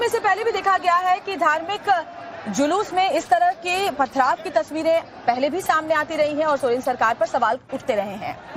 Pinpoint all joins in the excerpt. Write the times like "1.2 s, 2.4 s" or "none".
5.8 s